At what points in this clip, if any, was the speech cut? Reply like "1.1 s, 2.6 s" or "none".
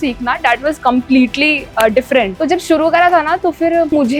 2.3 s